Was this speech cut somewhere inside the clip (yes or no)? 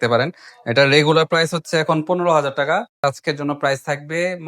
yes